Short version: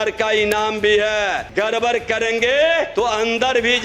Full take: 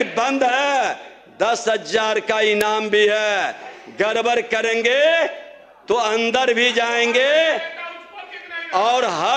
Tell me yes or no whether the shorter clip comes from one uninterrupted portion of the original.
no